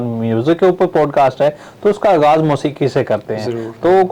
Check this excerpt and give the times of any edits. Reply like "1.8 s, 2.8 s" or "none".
none